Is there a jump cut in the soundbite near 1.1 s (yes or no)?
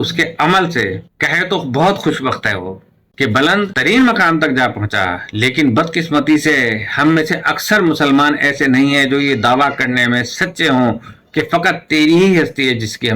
yes